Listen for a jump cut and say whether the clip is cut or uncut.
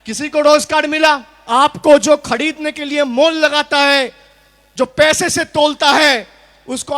cut